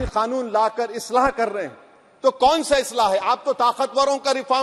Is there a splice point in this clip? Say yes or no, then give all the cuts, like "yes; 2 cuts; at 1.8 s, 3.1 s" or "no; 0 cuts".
no; 0 cuts